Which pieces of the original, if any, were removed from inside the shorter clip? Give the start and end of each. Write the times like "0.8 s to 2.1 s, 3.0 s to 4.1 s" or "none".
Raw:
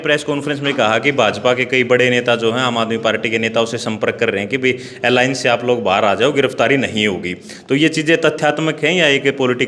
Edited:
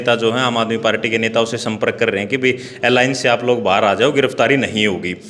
none